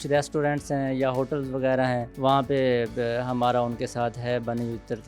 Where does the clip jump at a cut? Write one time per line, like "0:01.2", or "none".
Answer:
0:02.1